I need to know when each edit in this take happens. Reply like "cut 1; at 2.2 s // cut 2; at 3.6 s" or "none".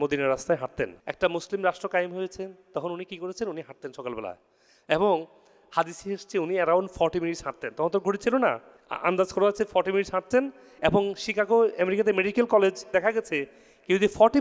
cut 1; at 1.0 s